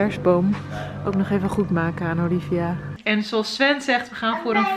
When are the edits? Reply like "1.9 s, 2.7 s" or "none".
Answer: 2.9 s